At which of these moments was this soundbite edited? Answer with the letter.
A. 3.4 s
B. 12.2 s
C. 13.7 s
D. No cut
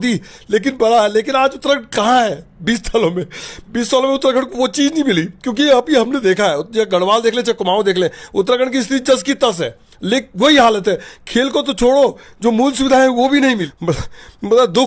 C